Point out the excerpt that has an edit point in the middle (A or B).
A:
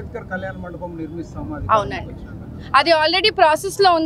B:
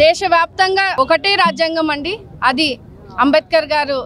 B